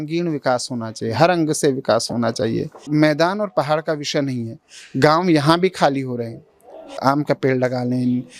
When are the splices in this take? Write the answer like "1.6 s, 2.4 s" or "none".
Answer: 2.8 s, 7.0 s